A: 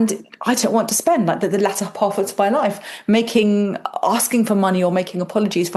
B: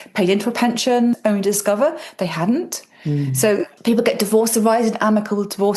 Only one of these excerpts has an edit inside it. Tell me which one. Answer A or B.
B